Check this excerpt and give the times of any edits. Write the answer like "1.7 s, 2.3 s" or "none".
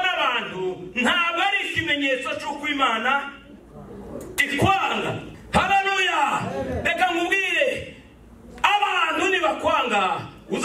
5.3 s